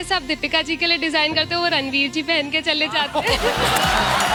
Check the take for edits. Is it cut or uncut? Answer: uncut